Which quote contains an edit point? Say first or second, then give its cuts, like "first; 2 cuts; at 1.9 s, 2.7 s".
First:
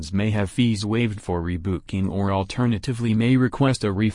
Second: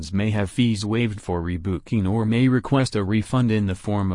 second; 1 cut; at 1.9 s